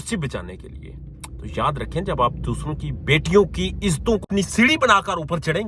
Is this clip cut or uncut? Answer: cut